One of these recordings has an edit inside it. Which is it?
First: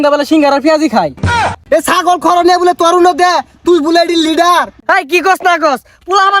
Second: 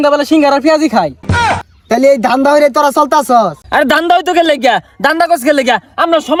first; 2 cuts; at 1.5 s, 4.7 s

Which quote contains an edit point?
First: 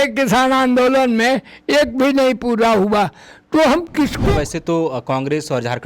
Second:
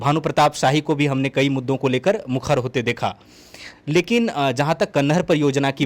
first; 1 cut; at 4.3 s

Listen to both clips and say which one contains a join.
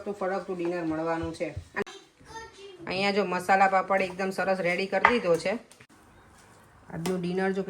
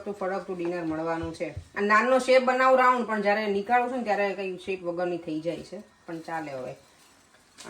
first; 2 cuts; at 1.8 s, 5.7 s

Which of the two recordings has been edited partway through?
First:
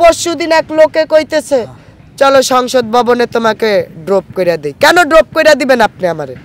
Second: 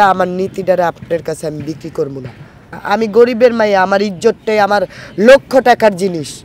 second; 1 cut; at 2.7 s

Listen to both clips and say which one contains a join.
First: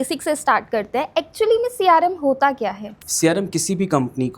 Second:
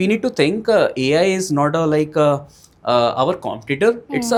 first; 1 cut; at 3.0 s

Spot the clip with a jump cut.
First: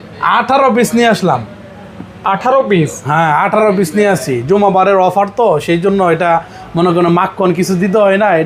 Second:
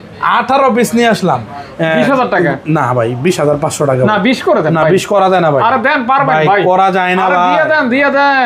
second; 1 cut; at 1.6 s

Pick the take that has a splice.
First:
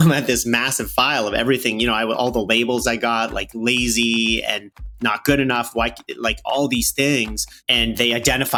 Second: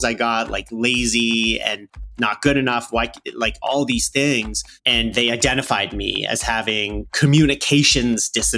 second; 1 cut; at 7.1 s

